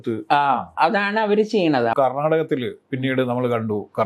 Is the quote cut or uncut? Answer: cut